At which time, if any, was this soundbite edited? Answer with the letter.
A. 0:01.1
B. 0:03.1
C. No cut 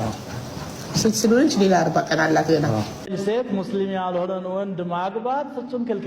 B